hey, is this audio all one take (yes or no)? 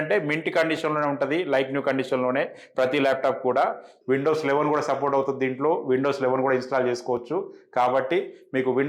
no